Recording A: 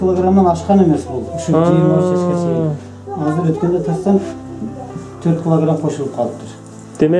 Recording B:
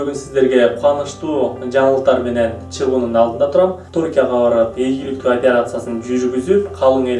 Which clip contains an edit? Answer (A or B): B